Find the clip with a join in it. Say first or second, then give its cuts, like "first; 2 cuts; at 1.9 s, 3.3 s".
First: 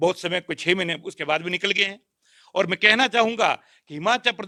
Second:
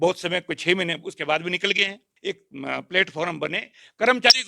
second; 1 cut; at 2.1 s